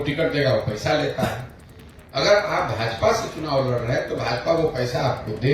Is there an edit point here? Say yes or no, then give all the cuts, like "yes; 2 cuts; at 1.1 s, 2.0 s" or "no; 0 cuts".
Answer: no; 0 cuts